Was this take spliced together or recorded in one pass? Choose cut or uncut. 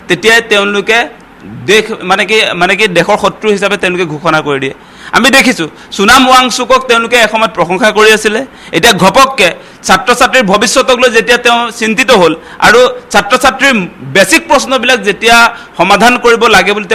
uncut